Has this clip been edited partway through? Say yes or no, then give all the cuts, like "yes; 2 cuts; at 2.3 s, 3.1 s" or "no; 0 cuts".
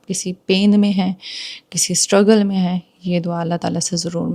no; 0 cuts